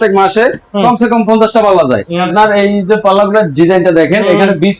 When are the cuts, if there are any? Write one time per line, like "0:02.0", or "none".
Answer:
0:02.2